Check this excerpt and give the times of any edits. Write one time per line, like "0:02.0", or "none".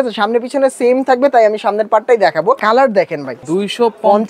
0:02.6
0:03.4